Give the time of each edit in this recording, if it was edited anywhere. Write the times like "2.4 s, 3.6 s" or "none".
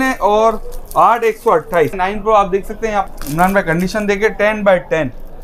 2.0 s, 3.1 s